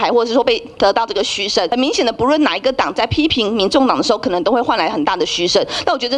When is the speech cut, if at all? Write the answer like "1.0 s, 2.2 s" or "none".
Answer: 1.7 s